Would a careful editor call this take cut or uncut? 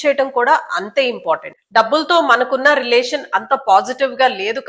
cut